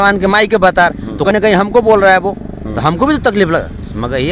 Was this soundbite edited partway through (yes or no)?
yes